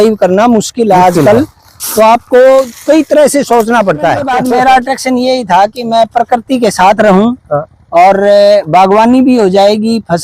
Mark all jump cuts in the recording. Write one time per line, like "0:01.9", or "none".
0:04.3